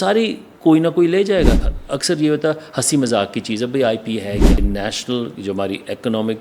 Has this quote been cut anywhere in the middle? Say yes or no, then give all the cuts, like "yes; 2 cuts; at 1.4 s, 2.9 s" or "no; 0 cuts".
yes; 2 cuts; at 1.8 s, 4.6 s